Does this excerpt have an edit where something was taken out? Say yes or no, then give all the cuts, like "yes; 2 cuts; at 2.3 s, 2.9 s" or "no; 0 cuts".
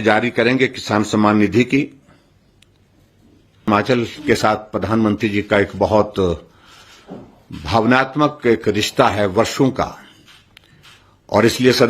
yes; 1 cut; at 3.7 s